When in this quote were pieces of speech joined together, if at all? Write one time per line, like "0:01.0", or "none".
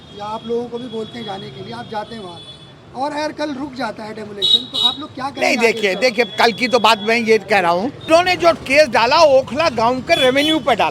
0:08.1